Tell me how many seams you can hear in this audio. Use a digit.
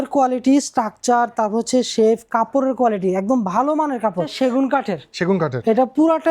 1